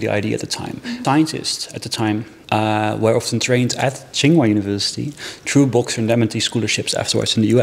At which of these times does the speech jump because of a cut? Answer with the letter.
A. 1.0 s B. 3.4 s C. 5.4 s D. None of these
A